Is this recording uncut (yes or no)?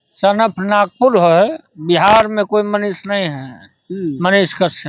yes